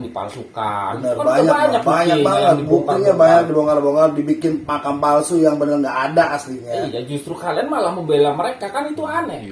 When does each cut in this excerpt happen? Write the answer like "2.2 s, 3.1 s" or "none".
none